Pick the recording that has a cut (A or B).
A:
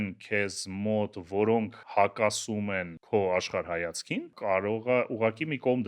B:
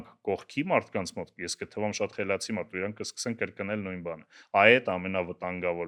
A